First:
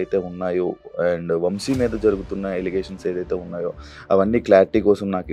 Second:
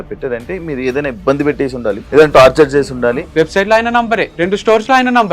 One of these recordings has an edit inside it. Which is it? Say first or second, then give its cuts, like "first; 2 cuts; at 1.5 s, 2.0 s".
second; 3 cuts; at 2.0 s, 3.2 s, 4.3 s